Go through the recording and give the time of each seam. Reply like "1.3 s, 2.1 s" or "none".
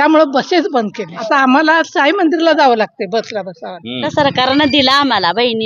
1.2 s, 4.1 s